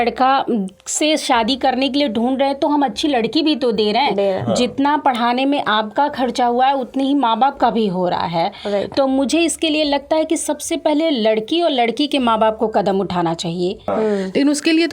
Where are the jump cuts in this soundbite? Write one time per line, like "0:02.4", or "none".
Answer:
0:13.9

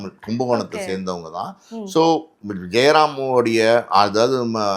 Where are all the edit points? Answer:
none

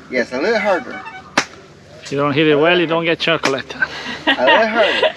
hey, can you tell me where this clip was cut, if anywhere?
none

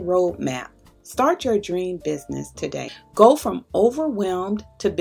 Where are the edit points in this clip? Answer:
0:03.0

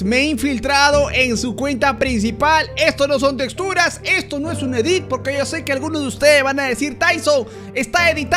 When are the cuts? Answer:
none

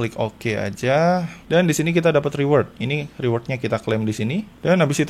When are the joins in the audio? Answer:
0:01.4

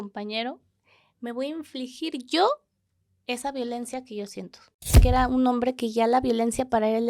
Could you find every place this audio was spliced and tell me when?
0:05.0

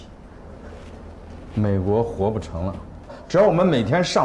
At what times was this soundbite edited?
0:03.2

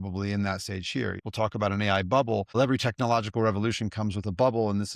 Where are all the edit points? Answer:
0:01.2
0:02.5

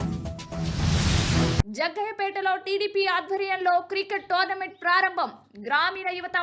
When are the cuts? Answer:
0:01.6

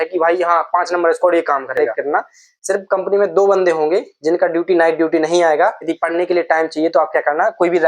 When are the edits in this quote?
0:01.8
0:05.9

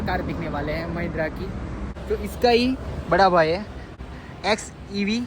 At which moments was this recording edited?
0:01.9
0:04.0

